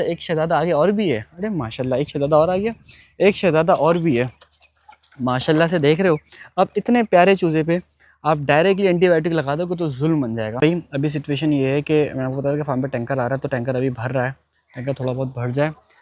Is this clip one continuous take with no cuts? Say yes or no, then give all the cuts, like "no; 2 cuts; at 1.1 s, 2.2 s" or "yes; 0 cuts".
no; 1 cut; at 10.5 s